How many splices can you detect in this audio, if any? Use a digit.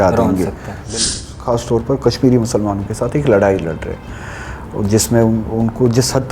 1